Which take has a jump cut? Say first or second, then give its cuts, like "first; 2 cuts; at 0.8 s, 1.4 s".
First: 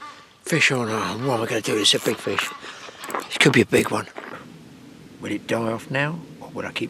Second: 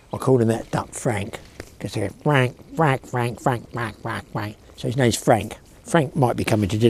first; 1 cut; at 4.3 s